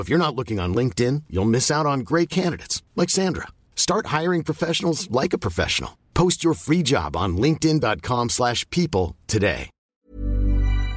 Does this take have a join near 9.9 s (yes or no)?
yes